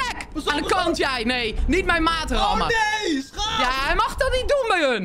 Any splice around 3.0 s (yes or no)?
no